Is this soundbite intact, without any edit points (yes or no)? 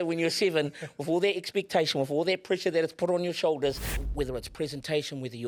no